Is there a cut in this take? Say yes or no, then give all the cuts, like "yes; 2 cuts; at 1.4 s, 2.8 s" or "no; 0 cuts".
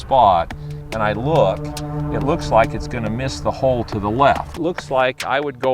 yes; 1 cut; at 4.5 s